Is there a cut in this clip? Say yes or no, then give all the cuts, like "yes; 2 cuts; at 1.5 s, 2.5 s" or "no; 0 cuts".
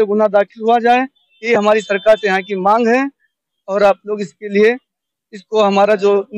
no; 0 cuts